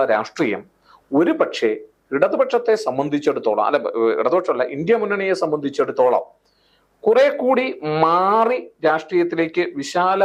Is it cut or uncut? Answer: uncut